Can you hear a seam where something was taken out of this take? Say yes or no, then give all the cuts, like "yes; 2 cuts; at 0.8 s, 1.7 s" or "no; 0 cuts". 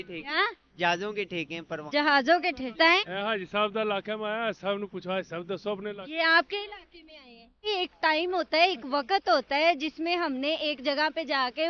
yes; 1 cut; at 7.7 s